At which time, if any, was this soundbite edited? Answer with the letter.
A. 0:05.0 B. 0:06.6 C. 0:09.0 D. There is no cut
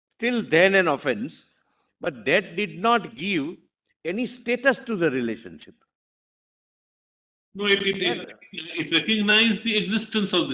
D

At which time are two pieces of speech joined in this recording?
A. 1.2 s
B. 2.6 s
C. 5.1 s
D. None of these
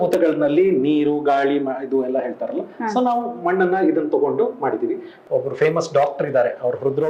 C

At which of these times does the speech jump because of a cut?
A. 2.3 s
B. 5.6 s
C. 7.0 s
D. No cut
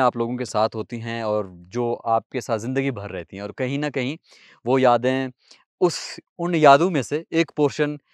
D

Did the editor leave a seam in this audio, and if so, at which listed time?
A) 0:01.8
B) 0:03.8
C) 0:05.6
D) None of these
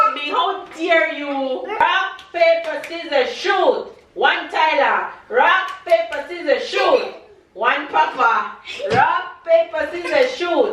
A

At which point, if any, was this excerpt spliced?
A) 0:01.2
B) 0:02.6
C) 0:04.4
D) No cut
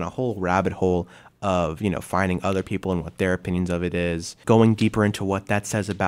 C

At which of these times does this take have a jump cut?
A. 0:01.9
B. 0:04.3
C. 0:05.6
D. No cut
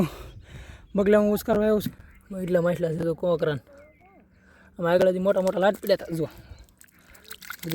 A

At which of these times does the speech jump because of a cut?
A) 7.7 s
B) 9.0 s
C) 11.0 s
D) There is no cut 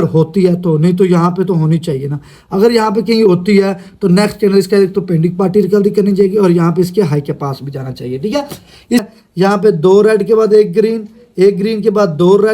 B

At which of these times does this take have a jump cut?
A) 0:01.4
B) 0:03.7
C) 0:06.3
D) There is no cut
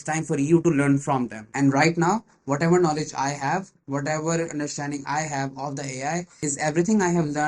A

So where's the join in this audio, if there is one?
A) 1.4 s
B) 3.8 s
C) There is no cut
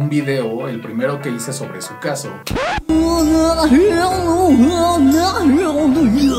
C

